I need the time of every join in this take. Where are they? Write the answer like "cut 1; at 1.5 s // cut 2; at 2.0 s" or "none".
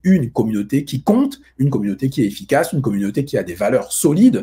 none